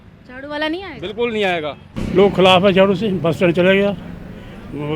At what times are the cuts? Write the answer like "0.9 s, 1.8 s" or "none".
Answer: 1.9 s